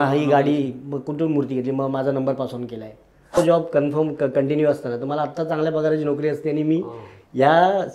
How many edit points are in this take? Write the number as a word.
one